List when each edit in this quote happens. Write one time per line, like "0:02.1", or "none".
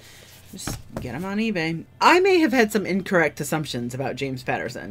0:01.8